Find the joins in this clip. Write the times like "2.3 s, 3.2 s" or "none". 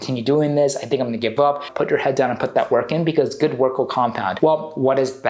1.7 s, 4.3 s